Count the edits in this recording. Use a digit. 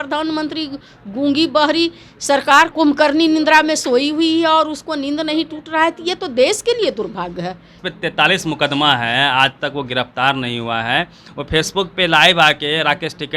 2